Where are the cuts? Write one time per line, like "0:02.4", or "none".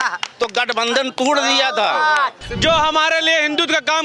0:02.4